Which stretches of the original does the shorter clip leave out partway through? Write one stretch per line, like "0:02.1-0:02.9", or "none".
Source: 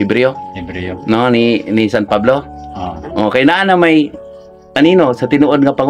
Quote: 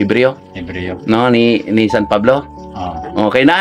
none